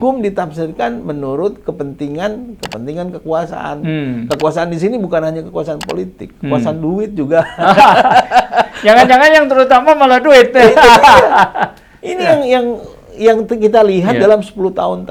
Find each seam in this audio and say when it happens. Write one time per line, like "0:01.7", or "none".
none